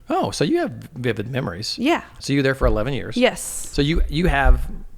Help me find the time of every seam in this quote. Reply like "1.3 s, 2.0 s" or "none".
2.1 s

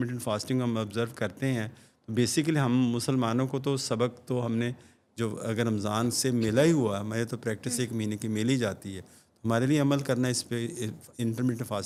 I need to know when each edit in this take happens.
none

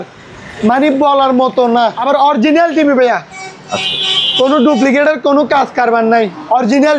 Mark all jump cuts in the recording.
2.0 s

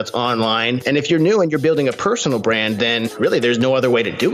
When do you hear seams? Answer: 0.8 s, 3.1 s

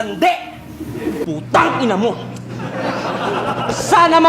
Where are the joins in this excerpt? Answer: 1.2 s

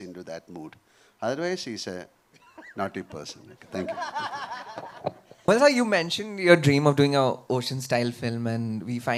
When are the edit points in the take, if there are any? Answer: none

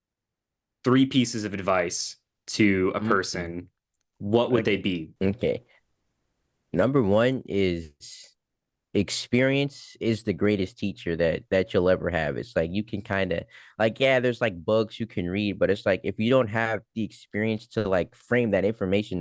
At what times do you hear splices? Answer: 5.1 s

